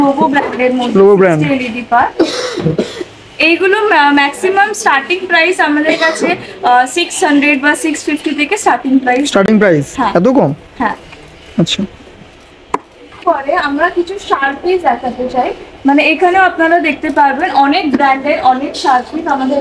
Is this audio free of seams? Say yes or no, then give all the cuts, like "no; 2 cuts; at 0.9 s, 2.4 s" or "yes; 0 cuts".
yes; 0 cuts